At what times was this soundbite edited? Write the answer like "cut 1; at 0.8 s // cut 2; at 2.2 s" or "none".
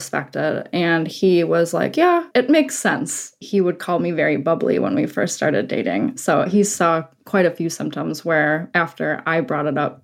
cut 1; at 2.3 s // cut 2; at 3.4 s